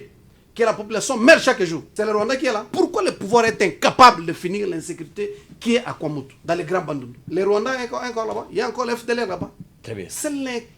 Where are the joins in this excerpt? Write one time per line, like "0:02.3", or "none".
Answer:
0:01.8
0:02.7
0:06.3
0:07.2